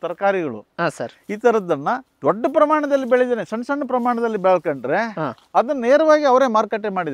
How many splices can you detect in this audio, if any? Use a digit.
1